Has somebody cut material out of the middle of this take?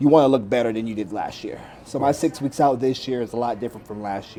no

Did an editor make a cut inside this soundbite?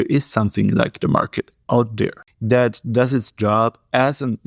yes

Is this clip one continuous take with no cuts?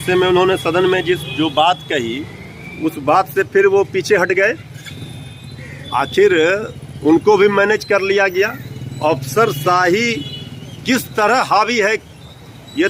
yes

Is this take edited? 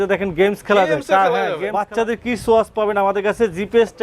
yes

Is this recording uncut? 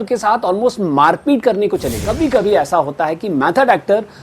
no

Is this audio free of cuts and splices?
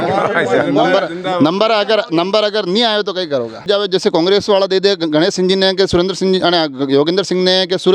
no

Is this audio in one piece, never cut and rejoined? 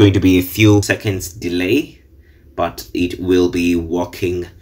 no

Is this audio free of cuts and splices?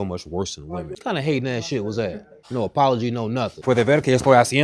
no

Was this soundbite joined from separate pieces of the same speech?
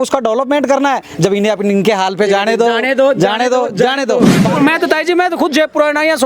yes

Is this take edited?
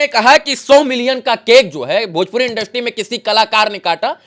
no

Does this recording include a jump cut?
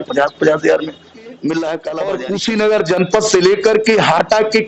yes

